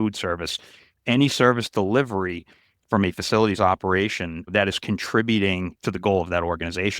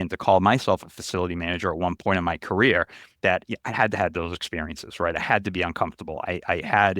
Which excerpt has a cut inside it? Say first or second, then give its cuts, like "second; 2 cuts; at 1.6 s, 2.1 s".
first; 2 cuts; at 4.5 s, 5.7 s